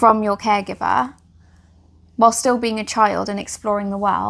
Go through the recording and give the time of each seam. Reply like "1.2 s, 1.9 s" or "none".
none